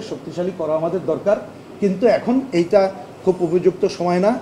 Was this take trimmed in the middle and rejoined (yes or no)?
no